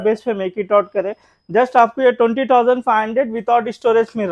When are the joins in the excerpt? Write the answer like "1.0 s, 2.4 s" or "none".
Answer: none